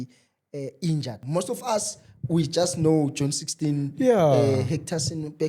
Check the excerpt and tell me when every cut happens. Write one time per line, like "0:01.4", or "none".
0:01.2